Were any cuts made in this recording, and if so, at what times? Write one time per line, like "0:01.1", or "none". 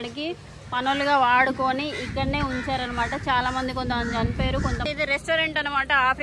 0:04.8